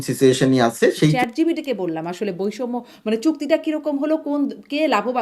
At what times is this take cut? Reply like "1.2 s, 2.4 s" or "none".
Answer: 1.2 s